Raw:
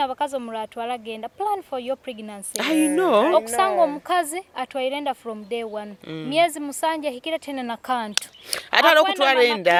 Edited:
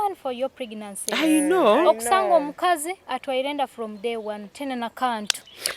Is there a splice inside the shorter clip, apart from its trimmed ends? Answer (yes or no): yes